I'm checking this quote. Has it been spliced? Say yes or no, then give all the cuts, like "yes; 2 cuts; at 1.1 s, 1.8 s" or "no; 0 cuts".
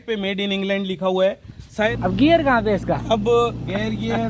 yes; 1 cut; at 1.9 s